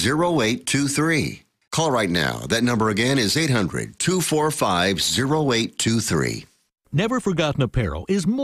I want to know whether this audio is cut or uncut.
cut